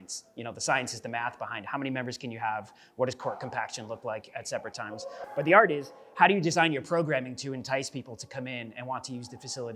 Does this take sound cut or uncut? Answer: uncut